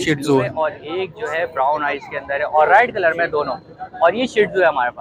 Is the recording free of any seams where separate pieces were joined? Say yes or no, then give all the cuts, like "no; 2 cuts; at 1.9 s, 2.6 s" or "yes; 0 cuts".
yes; 0 cuts